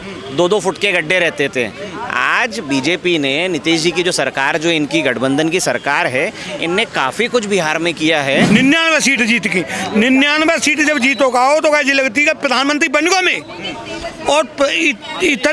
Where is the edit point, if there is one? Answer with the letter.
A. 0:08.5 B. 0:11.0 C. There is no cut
A